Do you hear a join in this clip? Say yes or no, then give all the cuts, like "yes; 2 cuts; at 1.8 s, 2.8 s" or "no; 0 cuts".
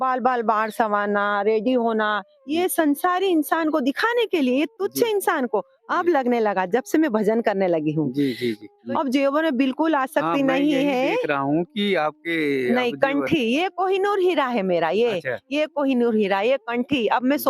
yes; 1 cut; at 8.8 s